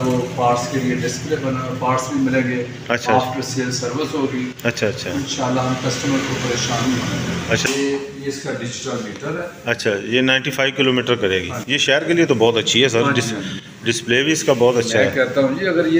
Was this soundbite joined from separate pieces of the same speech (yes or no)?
yes